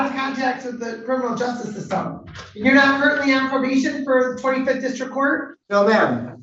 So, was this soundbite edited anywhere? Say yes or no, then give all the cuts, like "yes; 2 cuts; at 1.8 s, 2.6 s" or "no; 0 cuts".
yes; 1 cut; at 5.5 s